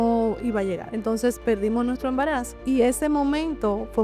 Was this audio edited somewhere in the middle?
yes; 2 cuts; at 0.9 s, 2.5 s

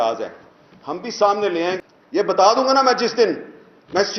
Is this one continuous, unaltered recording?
no; 1 cut; at 1.8 s

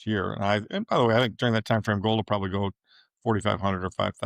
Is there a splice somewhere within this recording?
no; 0 cuts

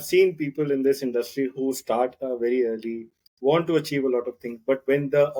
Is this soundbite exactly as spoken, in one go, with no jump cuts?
yes; 0 cuts

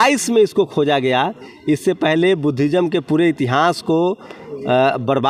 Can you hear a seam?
no; 0 cuts

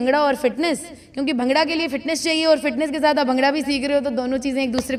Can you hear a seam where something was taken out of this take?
no; 0 cuts

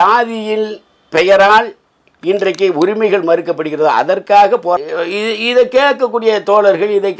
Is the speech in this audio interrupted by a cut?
yes; 1 cut; at 4.8 s

